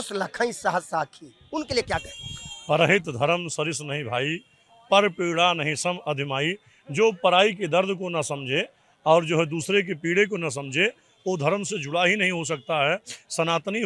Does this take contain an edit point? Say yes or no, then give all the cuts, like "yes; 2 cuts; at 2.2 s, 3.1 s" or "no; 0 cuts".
no; 0 cuts